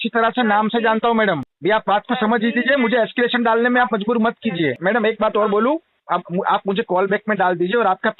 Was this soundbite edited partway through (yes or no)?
yes